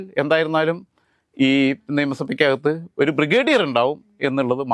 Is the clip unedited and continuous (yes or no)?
yes